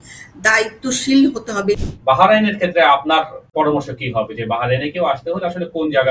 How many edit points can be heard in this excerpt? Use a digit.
2